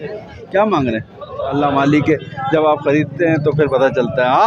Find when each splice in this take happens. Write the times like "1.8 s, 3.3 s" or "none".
1.5 s